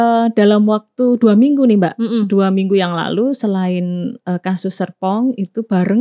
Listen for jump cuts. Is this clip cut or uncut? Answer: uncut